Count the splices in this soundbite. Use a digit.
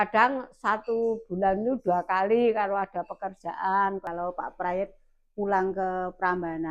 1